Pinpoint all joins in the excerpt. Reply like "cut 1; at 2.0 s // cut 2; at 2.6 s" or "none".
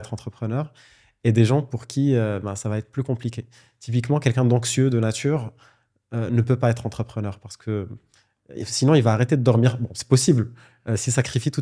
none